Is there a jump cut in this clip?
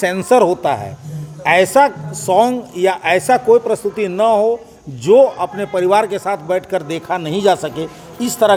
no; 0 cuts

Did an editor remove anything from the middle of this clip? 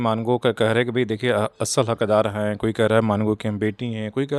no; 0 cuts

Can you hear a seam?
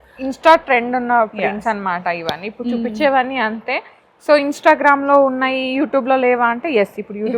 no; 0 cuts

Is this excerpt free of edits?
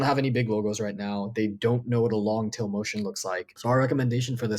no; 1 cut; at 3.5 s

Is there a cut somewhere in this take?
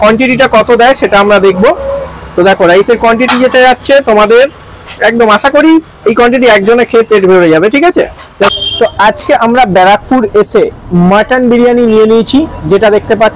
yes; 1 cut; at 8.5 s

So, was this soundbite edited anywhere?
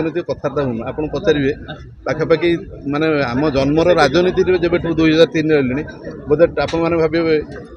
no; 0 cuts

